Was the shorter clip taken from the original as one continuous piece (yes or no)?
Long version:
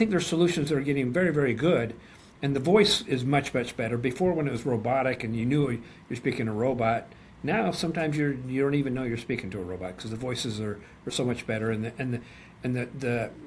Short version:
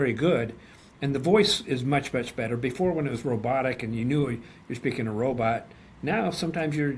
yes